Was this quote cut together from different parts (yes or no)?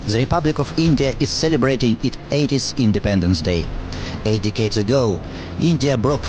no